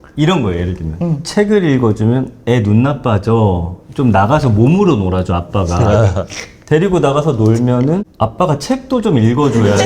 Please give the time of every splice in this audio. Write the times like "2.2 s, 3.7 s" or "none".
8.1 s